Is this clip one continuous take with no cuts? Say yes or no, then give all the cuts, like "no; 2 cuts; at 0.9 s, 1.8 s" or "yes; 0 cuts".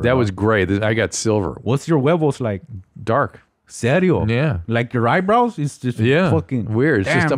no; 1 cut; at 1.6 s